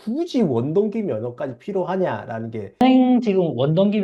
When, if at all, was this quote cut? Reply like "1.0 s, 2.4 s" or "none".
3.1 s